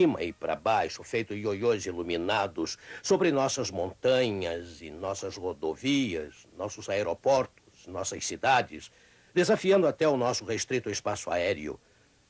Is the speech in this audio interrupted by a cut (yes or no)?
yes